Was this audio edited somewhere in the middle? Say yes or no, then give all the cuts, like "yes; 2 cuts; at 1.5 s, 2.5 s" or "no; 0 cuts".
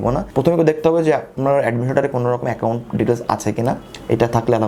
no; 0 cuts